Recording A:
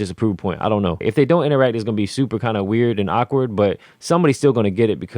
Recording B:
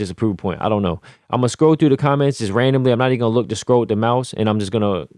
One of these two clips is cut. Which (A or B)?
A